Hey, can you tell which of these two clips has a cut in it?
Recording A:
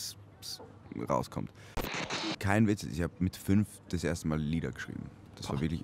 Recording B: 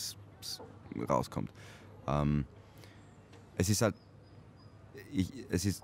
A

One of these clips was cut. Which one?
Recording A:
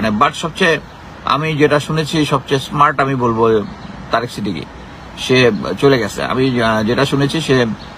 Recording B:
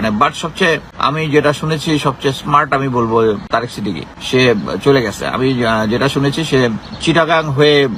B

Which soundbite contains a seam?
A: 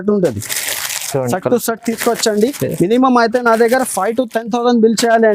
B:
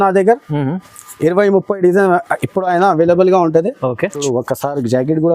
B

